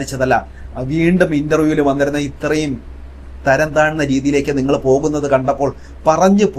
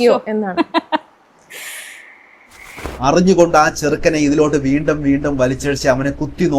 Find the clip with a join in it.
second; 1 cut; at 2.9 s

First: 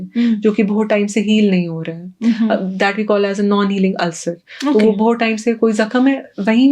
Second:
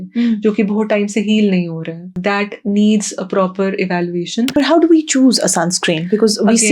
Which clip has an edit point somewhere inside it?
second; 2 cuts; at 2.1 s, 4.5 s

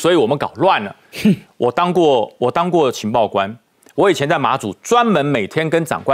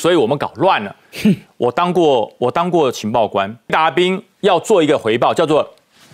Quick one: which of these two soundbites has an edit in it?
second; 1 cut; at 3.7 s

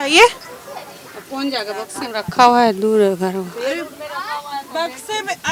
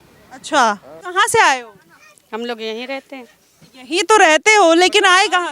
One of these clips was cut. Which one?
second; 1 cut; at 0.9 s

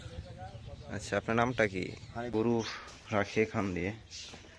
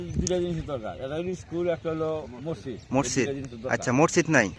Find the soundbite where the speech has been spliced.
first; 1 cut; at 2.3 s

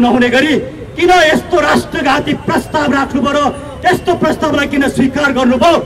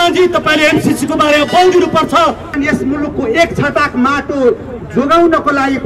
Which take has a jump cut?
second; 1 cut; at 2.5 s

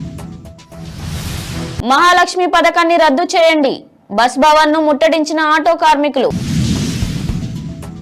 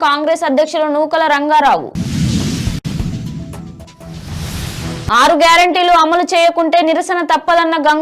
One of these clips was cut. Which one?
first; 1 cut; at 1.7 s

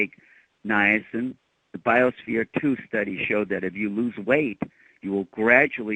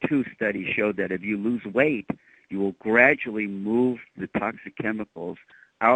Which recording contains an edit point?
first; 1 cut; at 1.4 s

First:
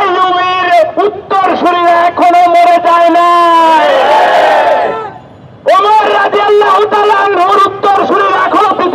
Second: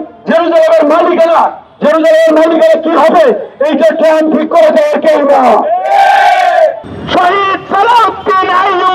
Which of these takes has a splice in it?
second; 1 cut; at 6.8 s

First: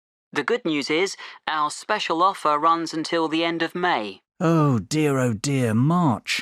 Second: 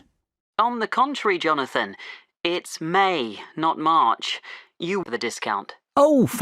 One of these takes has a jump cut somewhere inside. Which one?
second; 1 cut; at 5.0 s

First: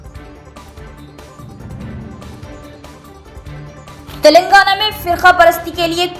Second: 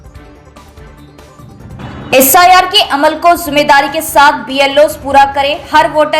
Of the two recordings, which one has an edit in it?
second; 1 cut; at 1.7 s

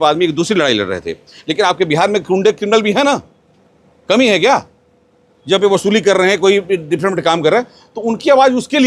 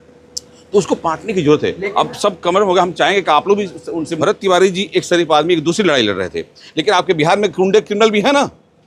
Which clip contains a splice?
second; 1 cut; at 4.1 s

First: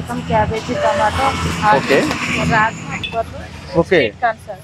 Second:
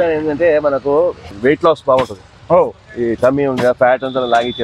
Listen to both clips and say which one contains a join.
first; 1 cut; at 2.9 s

